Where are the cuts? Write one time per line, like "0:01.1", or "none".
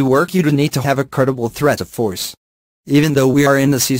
0:01.9
0:02.9